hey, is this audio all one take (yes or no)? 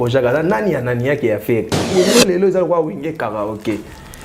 no